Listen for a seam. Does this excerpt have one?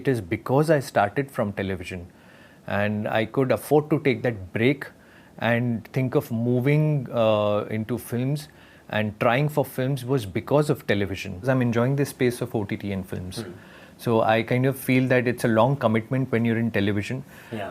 yes; 1 cut; at 11.5 s

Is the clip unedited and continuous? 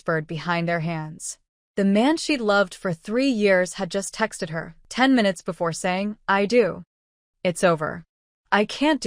no; 1 cut; at 4.8 s

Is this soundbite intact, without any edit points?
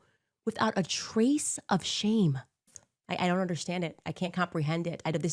no; 1 cut; at 2.9 s

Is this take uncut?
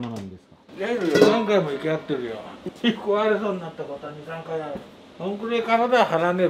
yes; 0 cuts

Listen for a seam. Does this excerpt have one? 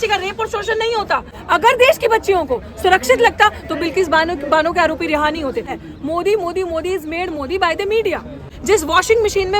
yes; 3 cuts; at 1.3 s, 5.8 s, 8.5 s

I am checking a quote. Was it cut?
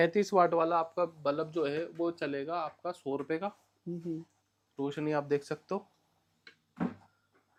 no; 0 cuts

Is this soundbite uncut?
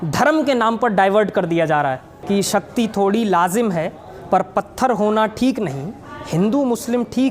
no; 1 cut; at 2.1 s

